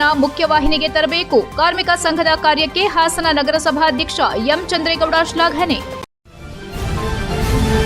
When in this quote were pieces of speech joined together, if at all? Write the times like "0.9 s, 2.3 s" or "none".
6.1 s